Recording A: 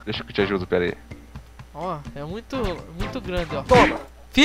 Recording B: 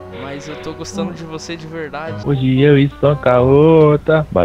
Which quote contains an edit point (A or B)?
B